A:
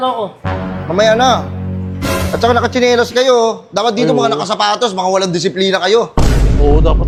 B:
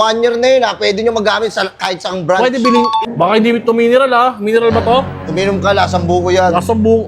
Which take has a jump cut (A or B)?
B